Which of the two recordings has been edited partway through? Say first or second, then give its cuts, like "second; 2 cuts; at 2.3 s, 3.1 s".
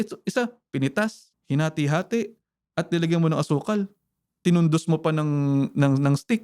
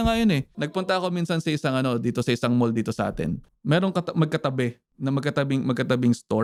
first; 1 cut; at 1.3 s